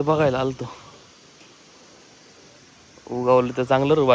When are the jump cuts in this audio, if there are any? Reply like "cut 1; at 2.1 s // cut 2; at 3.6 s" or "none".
none